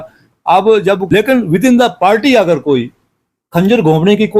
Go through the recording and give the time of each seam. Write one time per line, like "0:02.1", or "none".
0:01.0